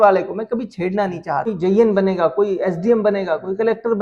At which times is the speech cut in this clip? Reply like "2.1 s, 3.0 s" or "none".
1.5 s